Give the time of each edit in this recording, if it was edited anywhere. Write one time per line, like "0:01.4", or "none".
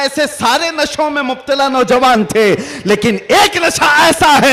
none